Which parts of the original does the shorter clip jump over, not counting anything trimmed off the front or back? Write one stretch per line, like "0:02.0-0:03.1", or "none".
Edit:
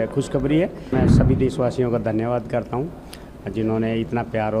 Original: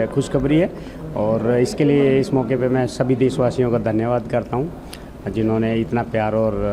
0:00.9-0:02.7